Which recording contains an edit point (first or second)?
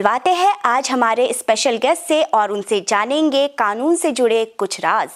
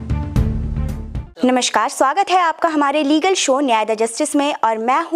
second